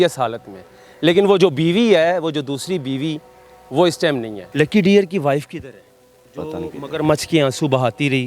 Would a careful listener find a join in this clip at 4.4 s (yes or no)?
yes